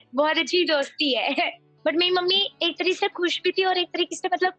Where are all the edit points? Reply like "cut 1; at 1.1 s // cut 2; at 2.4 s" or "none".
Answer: cut 1; at 1.6 s